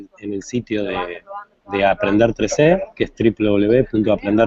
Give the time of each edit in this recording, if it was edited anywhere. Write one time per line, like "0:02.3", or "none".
0:02.3